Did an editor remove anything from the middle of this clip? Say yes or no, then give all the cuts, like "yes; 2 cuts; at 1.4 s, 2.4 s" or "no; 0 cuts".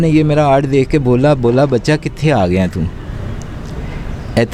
no; 0 cuts